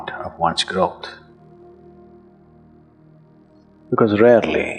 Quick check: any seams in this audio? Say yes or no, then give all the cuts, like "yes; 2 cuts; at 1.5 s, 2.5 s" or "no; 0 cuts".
yes; 2 cuts; at 1.1 s, 3.5 s